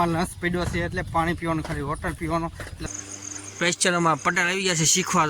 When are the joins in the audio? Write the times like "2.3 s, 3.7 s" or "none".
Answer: 2.7 s